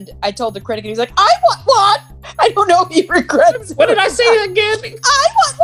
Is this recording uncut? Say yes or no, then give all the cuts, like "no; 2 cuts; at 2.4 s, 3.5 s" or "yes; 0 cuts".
no; 1 cut; at 2.2 s